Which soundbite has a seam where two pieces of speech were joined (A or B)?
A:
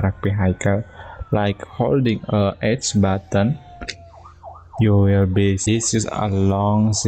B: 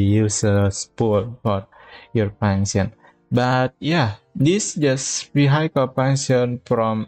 A